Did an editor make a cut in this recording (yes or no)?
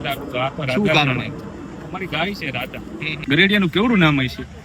yes